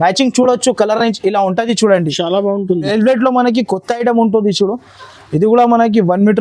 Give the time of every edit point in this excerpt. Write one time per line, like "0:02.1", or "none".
0:02.9